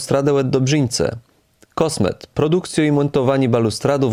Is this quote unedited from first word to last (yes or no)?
yes